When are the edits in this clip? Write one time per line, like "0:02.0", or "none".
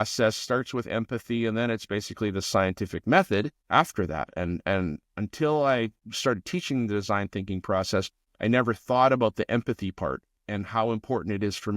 0:03.6
0:06.0
0:08.2